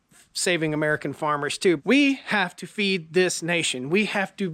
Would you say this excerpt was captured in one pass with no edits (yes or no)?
no